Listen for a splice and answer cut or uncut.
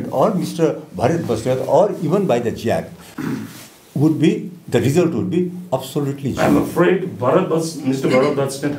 uncut